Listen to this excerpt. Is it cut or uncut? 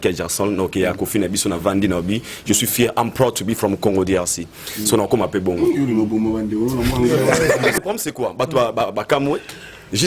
cut